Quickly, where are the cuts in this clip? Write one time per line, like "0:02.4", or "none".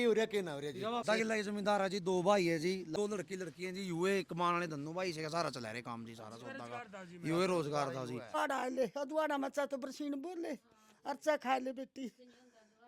0:01.0
0:02.9
0:08.4